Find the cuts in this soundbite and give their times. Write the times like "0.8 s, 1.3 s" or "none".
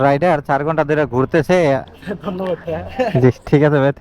1.9 s